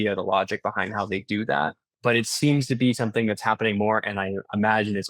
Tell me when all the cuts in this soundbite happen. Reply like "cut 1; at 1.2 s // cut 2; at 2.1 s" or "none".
cut 1; at 1.9 s